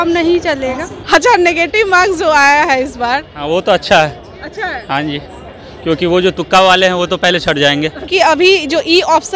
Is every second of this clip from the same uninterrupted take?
no; 2 cuts; at 0.9 s, 8.1 s

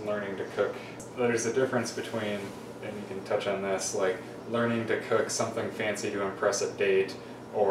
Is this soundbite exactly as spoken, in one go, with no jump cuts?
no; 1 cut; at 1.0 s

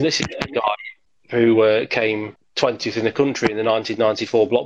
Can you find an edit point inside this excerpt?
no; 0 cuts

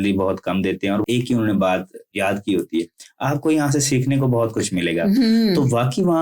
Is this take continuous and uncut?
no; 2 cuts; at 1.1 s, 2.1 s

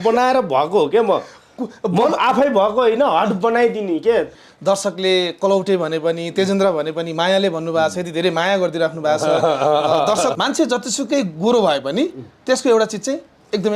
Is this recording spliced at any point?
yes; 2 cuts; at 4.3 s, 10.3 s

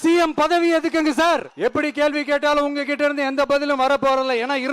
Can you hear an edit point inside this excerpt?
yes; 1 cut; at 1.5 s

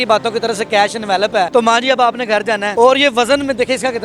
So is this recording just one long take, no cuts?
no; 2 cuts; at 1.5 s, 2.7 s

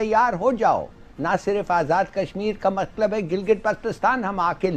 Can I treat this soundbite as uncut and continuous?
yes; 0 cuts

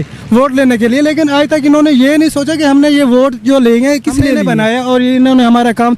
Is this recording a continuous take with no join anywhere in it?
no; 1 cut; at 4.4 s

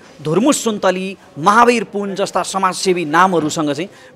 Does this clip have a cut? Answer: no; 0 cuts

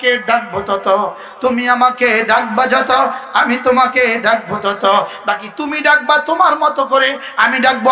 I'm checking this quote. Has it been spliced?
no; 0 cuts

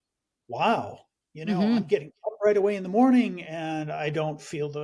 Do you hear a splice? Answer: no; 0 cuts

